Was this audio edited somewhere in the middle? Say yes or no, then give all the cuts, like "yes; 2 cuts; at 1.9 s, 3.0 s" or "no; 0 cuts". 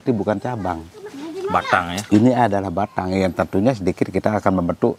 no; 0 cuts